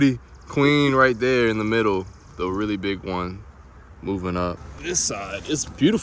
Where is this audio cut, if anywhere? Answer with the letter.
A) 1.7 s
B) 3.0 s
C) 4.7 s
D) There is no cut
C